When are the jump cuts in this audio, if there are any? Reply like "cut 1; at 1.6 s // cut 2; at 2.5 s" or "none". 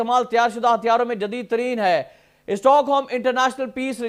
none